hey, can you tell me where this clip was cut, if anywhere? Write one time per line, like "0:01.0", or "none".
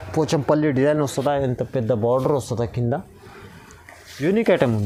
none